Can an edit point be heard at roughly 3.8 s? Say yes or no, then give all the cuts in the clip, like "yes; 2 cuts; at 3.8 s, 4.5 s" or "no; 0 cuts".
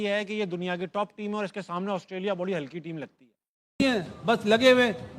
yes; 1 cut; at 3.8 s